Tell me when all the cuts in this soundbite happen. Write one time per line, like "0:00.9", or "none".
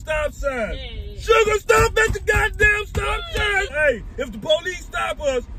0:03.7

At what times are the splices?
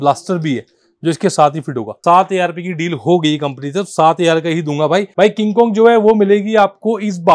0:01.9
0:05.1

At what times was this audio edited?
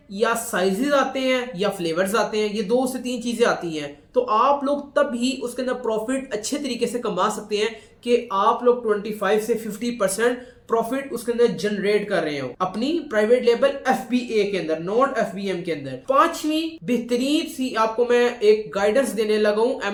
none

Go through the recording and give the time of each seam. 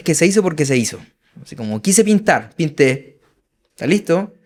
none

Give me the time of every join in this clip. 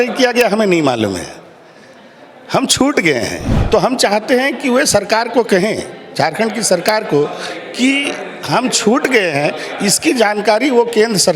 0:03.5

